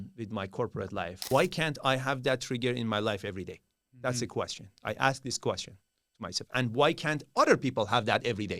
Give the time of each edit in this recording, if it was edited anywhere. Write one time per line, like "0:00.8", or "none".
0:01.2